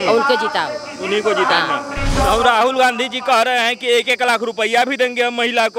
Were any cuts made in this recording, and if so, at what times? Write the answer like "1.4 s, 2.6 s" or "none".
2.1 s